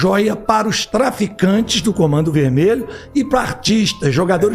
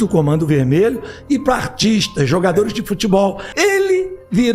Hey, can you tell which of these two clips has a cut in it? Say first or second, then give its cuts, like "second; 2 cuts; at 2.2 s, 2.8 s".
second; 1 cut; at 3.6 s